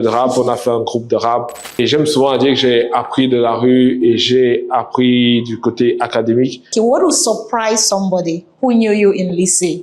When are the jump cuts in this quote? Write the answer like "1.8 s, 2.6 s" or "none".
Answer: 1.8 s, 6.7 s